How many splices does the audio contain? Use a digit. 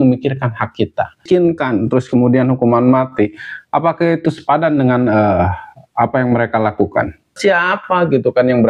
2